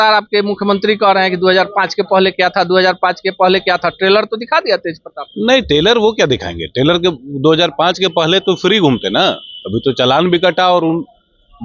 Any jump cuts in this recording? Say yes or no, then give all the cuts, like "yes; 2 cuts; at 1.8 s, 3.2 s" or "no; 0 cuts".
no; 0 cuts